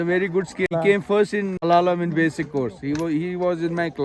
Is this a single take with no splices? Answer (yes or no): no